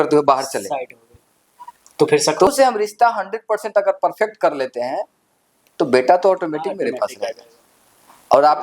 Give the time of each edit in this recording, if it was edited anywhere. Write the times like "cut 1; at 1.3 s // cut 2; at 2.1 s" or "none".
cut 1; at 2.5 s